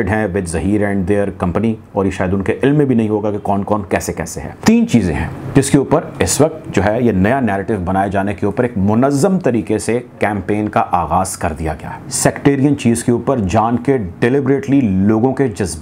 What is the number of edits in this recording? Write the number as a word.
two